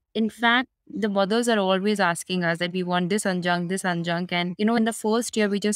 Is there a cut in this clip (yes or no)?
yes